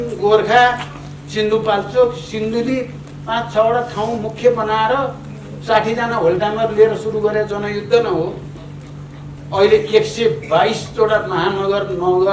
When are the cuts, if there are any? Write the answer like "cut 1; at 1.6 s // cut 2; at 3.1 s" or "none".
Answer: none